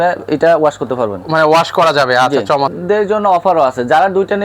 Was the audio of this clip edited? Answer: yes; 1 cut; at 2.8 s

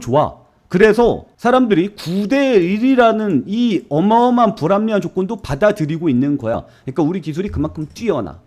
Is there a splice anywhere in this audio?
yes; 1 cut; at 6.6 s

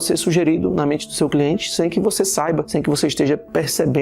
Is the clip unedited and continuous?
no; 1 cut; at 2.7 s

